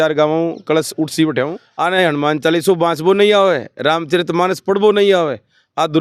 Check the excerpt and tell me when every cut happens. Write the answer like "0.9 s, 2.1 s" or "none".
1.6 s